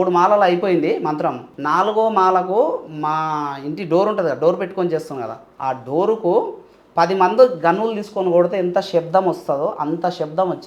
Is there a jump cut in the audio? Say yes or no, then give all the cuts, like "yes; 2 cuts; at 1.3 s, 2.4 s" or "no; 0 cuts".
yes; 1 cut; at 1.5 s